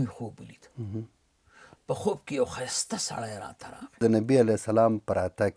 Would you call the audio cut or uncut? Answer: cut